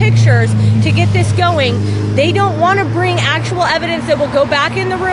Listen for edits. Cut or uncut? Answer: cut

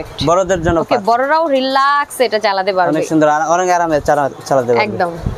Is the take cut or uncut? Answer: uncut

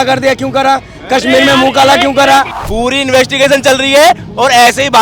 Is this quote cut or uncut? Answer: cut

